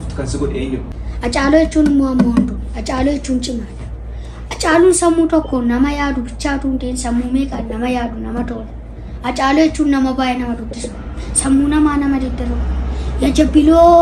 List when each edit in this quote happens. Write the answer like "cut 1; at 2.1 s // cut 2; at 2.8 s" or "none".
cut 1; at 1.0 s